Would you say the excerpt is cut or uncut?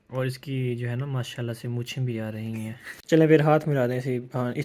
cut